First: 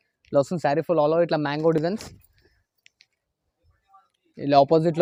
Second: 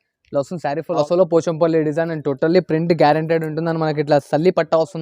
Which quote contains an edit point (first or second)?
second